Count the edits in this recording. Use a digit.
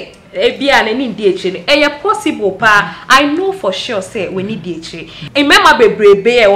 1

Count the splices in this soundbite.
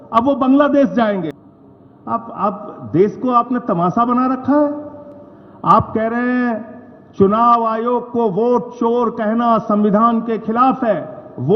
1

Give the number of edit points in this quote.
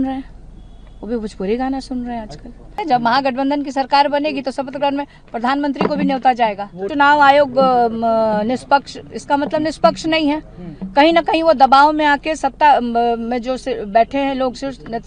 2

